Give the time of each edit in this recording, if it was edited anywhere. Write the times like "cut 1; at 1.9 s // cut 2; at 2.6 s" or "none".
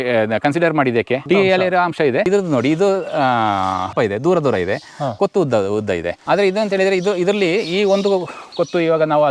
cut 1; at 1.2 s // cut 2; at 2.3 s // cut 3; at 3.9 s // cut 4; at 6.2 s